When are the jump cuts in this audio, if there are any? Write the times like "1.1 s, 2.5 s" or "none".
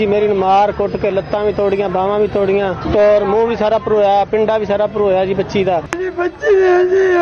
none